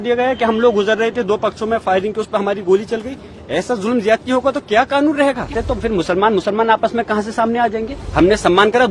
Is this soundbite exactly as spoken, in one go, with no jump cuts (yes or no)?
no